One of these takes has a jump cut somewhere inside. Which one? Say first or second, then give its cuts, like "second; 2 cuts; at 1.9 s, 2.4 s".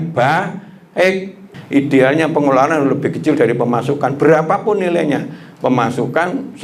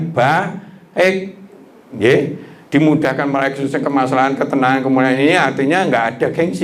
first; 1 cut; at 1.5 s